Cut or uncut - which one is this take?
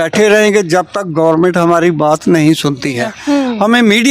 cut